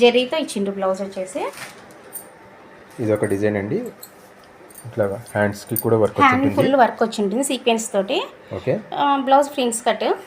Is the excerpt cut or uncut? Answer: cut